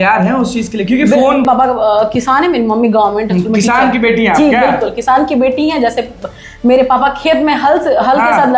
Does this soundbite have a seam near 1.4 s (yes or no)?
yes